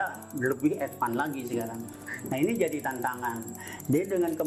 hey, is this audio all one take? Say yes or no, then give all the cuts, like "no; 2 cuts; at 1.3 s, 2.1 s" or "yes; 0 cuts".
yes; 0 cuts